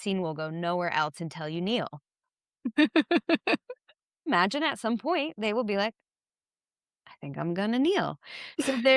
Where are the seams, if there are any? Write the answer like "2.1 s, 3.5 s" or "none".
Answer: 4.3 s